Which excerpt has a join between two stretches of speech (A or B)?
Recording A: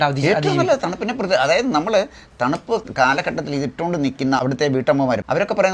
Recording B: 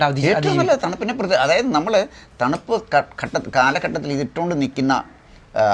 A